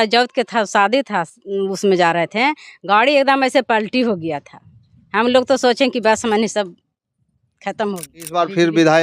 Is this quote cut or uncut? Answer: cut